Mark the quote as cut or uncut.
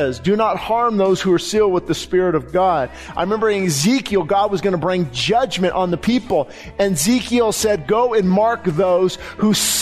cut